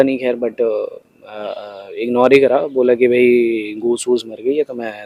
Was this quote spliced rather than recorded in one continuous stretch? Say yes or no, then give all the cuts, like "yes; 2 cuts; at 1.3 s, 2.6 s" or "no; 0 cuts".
no; 0 cuts